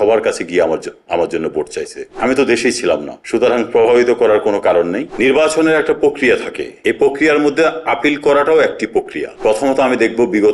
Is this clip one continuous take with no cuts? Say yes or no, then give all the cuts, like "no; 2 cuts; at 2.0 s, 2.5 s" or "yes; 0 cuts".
no; 3 cuts; at 2.1 s, 5.0 s, 9.3 s